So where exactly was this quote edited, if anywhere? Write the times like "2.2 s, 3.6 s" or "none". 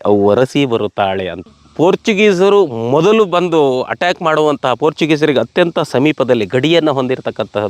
1.5 s